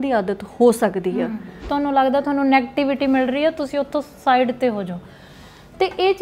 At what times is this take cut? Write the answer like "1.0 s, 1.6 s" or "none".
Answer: 1.6 s